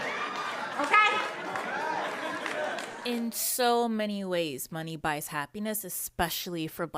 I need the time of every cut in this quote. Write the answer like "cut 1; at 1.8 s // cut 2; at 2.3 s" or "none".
cut 1; at 3.0 s